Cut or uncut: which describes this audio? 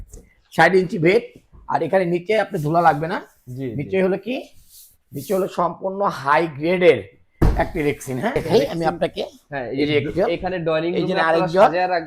cut